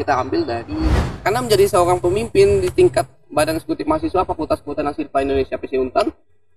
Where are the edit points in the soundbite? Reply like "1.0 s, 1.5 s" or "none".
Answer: 1.0 s